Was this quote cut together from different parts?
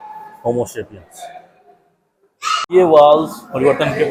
no; 0 cuts

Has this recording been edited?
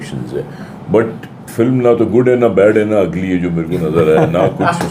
no; 0 cuts

